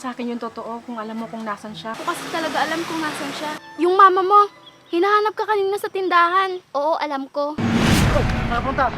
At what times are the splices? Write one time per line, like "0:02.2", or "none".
0:02.0
0:03.6
0:06.6
0:07.6